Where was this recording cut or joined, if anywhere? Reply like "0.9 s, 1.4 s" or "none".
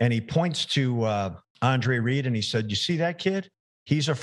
1.4 s

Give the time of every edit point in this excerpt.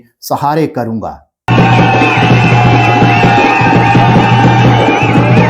1.5 s

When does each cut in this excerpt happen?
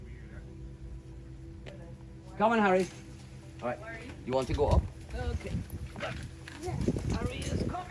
none

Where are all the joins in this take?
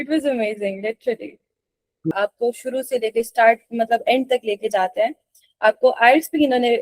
2.1 s

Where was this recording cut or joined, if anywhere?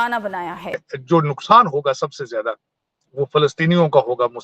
0.9 s

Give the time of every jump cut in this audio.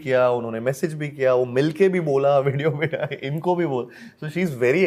none

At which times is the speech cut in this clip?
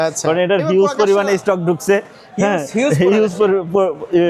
none

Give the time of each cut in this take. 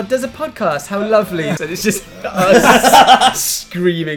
1.6 s

